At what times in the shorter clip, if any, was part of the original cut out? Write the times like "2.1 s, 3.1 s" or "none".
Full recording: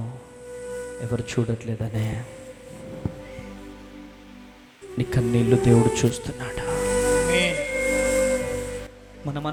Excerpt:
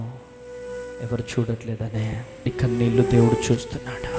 2.5 s